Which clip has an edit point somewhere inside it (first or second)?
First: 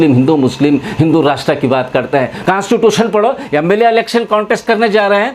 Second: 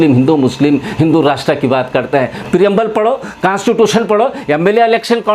first